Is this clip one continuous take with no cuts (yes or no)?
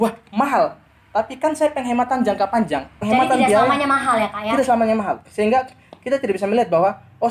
no